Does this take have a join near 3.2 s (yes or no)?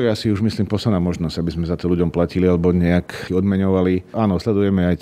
yes